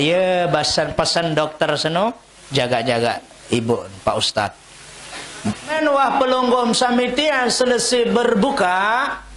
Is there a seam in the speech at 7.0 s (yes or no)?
no